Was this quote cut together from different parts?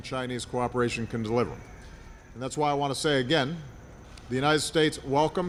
no; 0 cuts

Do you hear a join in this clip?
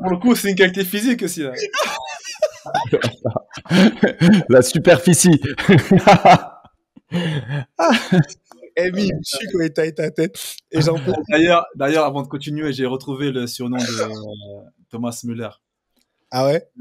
no; 0 cuts

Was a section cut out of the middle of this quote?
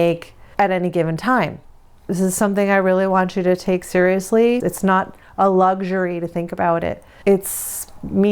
yes; 1 cut; at 2.0 s

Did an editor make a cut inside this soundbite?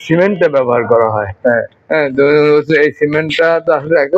no; 0 cuts

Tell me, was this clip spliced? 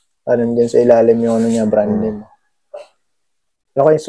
no; 0 cuts

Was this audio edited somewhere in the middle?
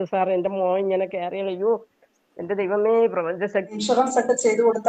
yes; 1 cut; at 3.7 s

